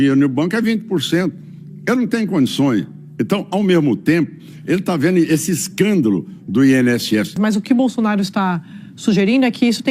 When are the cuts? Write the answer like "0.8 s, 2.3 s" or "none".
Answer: 7.4 s